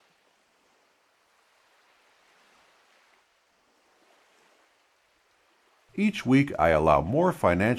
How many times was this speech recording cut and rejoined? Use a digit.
1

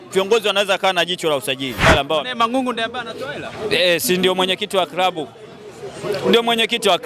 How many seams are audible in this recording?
1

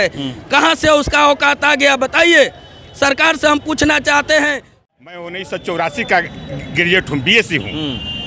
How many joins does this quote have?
1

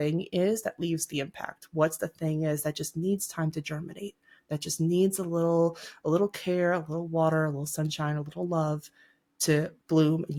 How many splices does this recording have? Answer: 0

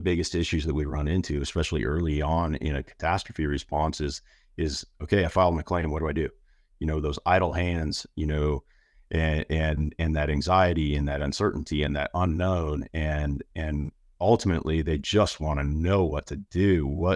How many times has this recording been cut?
0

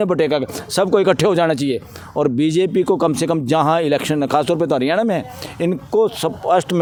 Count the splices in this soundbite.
0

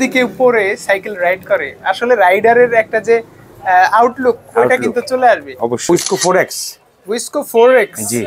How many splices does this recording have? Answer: 1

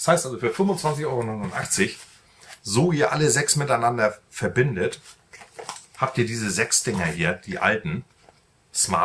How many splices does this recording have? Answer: 0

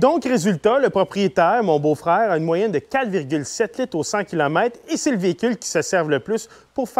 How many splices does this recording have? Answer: 0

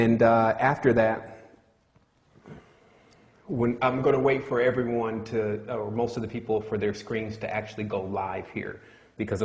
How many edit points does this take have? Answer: 0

